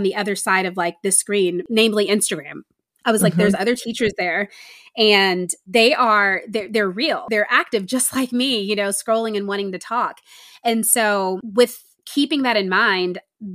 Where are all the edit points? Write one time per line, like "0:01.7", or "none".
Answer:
0:01.6
0:05.5
0:07.2
0:11.4